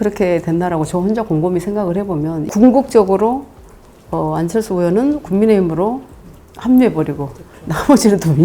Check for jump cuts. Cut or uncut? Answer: cut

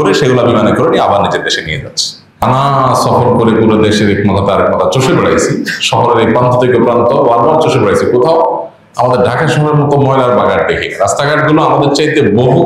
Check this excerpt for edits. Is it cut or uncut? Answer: cut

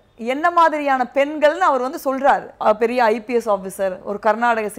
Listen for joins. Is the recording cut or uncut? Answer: cut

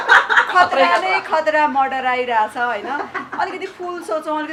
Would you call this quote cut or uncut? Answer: uncut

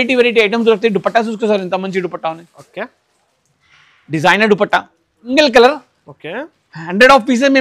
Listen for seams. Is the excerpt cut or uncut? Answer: cut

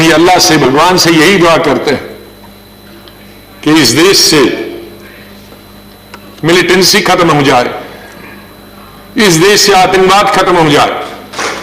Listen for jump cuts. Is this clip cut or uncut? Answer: uncut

